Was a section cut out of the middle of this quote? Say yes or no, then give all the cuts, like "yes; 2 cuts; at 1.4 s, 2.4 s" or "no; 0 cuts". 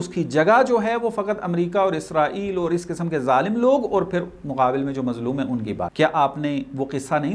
yes; 1 cut; at 5.9 s